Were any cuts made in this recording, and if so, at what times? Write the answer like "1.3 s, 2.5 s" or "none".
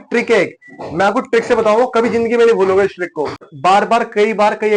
3.5 s